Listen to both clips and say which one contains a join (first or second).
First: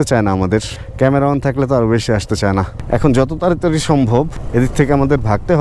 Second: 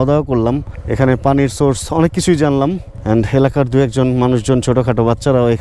first